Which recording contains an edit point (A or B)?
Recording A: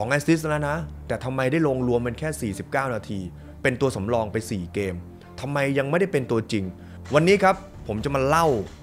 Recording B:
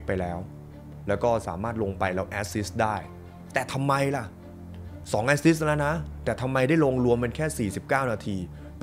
A